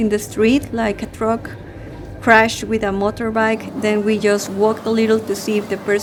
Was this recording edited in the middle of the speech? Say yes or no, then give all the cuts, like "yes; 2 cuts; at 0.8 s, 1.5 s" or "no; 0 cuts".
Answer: no; 0 cuts